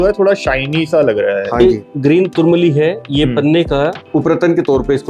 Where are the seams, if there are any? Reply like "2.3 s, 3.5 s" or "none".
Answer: 1.6 s, 4.0 s